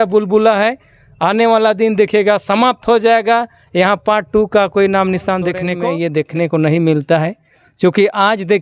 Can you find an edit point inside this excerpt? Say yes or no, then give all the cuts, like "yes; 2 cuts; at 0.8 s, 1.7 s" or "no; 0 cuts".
yes; 1 cut; at 5.7 s